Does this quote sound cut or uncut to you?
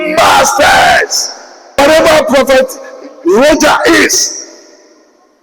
cut